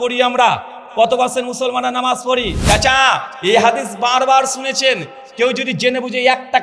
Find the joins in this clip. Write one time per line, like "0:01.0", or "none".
0:02.6